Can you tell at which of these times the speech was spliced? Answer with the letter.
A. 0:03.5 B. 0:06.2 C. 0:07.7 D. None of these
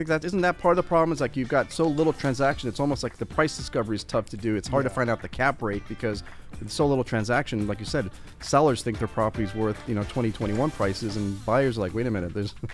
D